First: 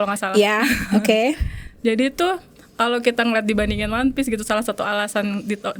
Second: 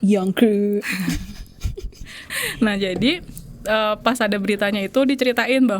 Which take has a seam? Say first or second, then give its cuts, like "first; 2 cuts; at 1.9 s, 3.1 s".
second; 1 cut; at 2.3 s